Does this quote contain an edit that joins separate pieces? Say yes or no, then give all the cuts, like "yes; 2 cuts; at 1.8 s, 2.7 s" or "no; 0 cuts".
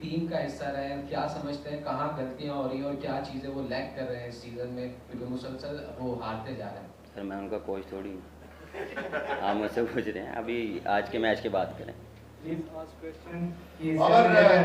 no; 0 cuts